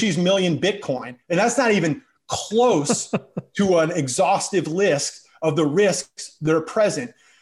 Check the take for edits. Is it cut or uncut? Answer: cut